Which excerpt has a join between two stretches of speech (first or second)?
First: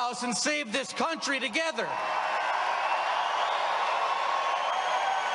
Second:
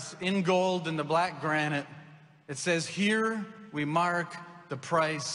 second